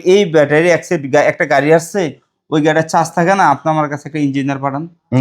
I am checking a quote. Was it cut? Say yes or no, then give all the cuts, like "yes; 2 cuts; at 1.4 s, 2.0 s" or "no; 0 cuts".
no; 0 cuts